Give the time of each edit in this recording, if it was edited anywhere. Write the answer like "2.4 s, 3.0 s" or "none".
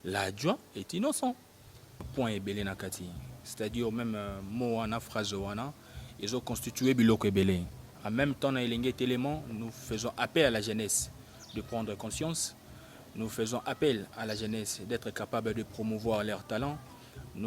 2.0 s